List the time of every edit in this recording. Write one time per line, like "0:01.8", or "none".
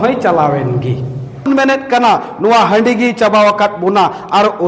0:01.5